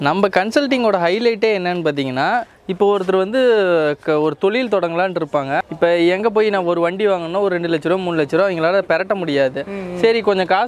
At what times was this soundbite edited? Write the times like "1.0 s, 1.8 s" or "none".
5.6 s